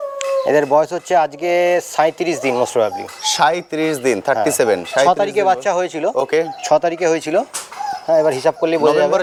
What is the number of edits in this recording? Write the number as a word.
zero